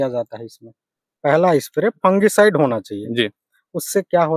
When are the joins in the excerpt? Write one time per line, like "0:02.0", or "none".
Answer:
0:01.1